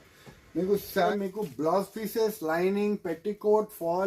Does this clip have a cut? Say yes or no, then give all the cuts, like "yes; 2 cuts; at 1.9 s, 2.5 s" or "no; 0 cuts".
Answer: yes; 1 cut; at 1.1 s